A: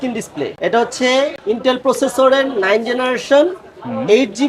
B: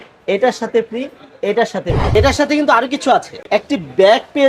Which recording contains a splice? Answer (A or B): B